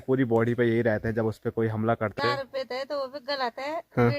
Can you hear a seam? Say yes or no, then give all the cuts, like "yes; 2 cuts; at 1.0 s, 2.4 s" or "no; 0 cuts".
yes; 1 cut; at 2.2 s